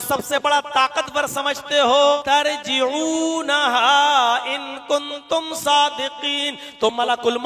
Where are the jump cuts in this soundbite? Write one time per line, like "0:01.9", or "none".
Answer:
0:02.2